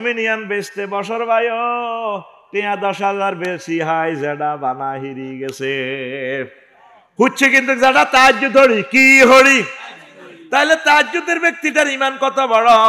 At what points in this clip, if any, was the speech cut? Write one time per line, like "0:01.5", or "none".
none